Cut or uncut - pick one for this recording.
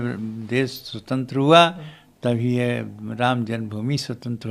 uncut